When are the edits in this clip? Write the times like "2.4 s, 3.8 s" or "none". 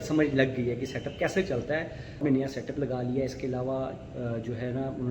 2.2 s

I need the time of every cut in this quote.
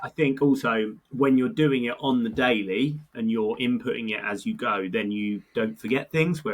1.0 s

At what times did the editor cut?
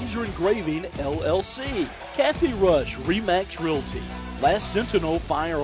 2.0 s

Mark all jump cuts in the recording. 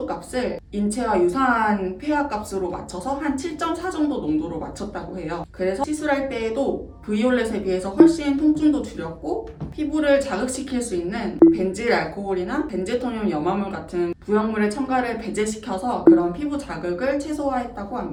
none

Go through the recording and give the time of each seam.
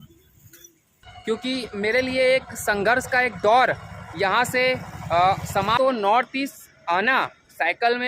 1.1 s, 5.8 s

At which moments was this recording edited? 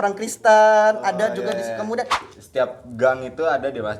2.2 s

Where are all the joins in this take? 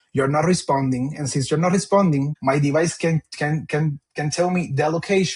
2.3 s

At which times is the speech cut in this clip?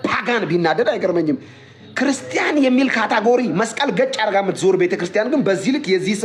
none

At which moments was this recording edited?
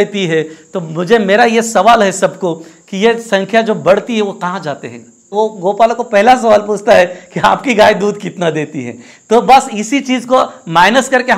5.3 s

